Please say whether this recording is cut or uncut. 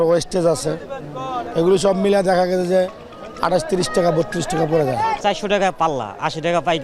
uncut